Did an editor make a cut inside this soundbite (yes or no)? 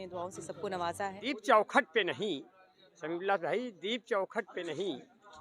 yes